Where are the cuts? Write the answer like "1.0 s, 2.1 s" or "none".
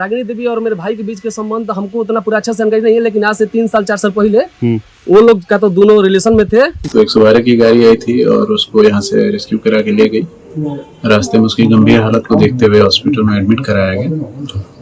6.8 s